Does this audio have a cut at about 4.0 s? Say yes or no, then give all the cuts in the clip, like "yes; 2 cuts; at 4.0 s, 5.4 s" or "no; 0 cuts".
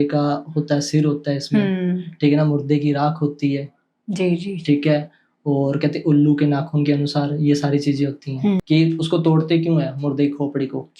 no; 1 cut; at 8.6 s